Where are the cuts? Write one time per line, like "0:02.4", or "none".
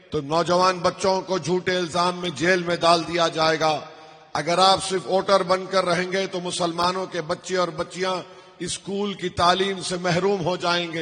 none